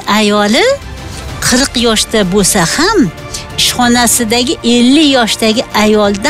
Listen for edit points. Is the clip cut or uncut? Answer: uncut